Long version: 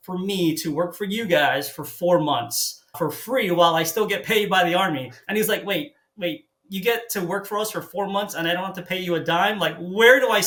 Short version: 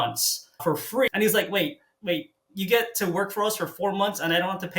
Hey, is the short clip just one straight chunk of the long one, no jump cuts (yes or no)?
no